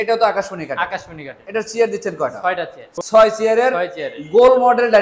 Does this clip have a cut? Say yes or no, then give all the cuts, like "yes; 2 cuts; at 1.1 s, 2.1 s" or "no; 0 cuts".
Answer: no; 0 cuts